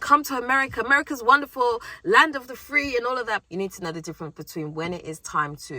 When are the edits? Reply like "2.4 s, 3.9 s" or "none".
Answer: 3.4 s